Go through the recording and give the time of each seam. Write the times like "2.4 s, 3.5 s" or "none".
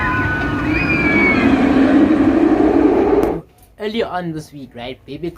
3.4 s